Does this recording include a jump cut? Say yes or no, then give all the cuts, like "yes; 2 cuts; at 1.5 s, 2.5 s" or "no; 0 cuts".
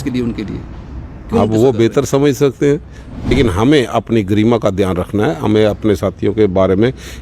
yes; 1 cut; at 3.3 s